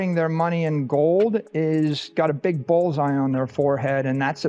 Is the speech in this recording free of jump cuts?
yes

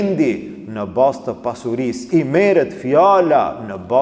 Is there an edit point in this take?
yes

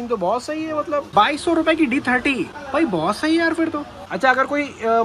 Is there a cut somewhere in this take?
yes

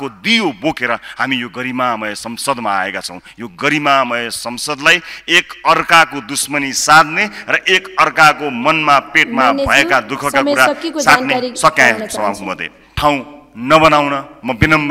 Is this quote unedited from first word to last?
no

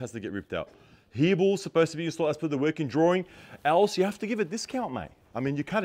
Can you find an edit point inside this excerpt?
no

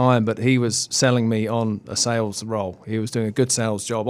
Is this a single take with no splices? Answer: yes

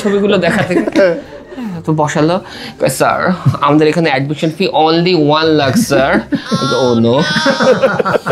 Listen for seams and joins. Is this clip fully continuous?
yes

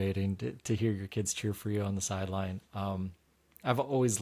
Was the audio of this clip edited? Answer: no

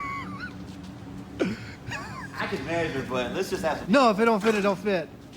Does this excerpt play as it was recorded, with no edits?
yes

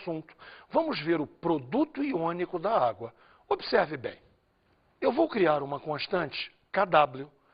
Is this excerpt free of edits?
yes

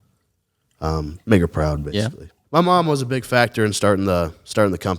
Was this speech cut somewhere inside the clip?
yes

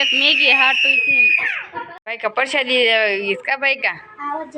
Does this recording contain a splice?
yes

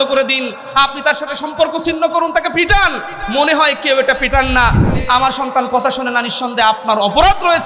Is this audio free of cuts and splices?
no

